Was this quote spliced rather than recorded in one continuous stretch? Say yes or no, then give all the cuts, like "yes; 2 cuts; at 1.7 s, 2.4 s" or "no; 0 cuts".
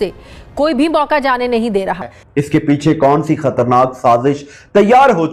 no; 0 cuts